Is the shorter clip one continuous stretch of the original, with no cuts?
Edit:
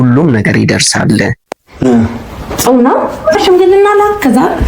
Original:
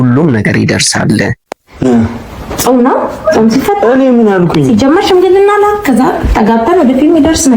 no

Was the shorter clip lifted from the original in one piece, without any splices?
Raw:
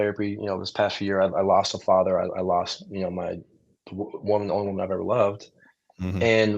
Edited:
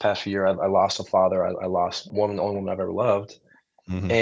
no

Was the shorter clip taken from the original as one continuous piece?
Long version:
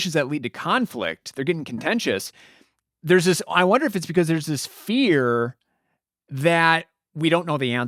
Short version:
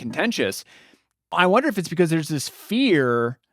no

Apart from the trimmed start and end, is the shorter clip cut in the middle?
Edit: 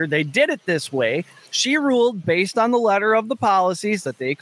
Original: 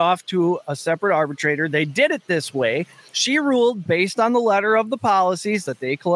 no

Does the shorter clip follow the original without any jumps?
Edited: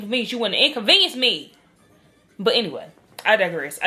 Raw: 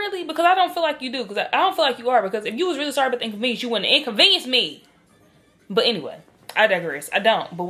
yes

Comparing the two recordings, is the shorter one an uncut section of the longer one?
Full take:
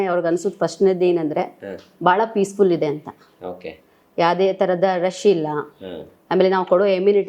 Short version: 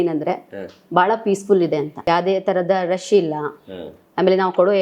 no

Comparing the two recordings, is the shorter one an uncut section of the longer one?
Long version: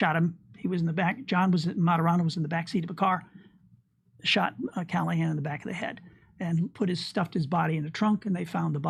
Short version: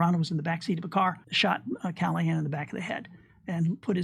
no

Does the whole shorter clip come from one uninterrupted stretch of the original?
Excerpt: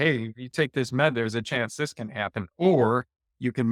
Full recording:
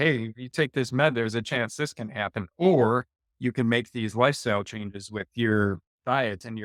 yes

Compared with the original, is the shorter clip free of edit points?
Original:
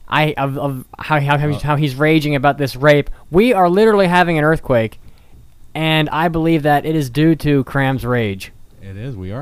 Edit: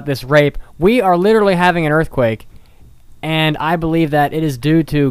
yes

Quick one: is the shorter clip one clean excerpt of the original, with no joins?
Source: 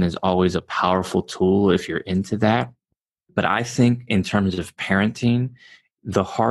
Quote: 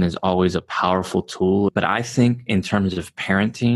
no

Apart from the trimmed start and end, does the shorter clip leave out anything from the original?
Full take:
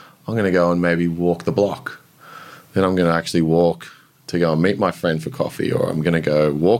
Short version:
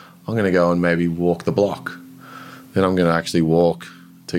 no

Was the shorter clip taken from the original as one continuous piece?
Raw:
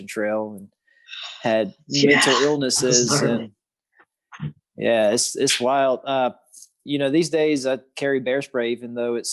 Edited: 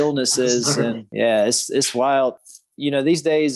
no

